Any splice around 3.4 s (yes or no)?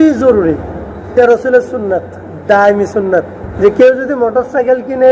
yes